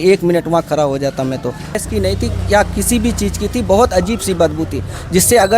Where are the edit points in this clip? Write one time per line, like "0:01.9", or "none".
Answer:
0:01.8